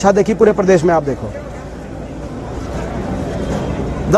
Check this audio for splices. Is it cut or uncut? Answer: uncut